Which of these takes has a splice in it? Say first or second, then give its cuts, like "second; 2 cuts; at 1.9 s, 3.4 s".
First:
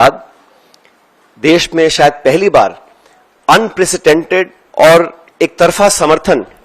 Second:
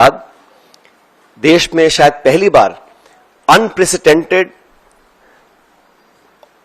first; 2 cuts; at 4.6 s, 5.2 s